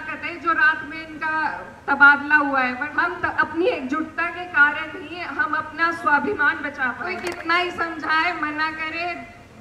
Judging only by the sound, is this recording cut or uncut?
cut